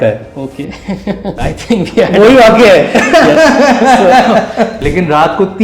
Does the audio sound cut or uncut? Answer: cut